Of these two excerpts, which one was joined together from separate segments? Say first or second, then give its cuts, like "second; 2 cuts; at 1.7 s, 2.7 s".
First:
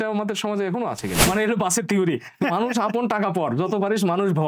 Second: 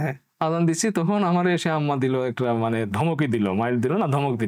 first; 1 cut; at 1.2 s